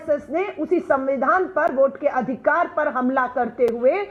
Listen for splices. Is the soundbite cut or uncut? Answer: uncut